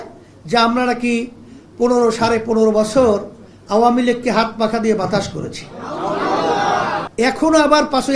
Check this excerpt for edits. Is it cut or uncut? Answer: cut